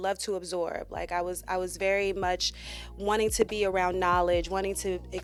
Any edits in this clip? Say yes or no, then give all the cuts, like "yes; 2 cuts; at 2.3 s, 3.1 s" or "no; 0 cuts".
no; 0 cuts